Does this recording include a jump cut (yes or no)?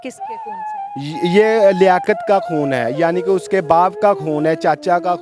no